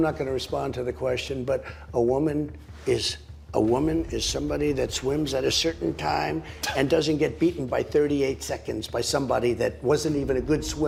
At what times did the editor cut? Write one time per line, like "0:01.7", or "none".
none